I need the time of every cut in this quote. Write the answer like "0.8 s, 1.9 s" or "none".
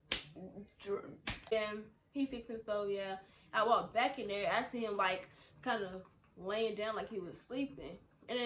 1.5 s